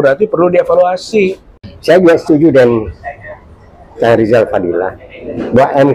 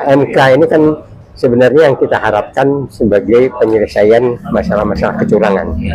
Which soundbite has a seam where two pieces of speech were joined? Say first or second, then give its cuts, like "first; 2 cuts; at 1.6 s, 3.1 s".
first; 1 cut; at 1.5 s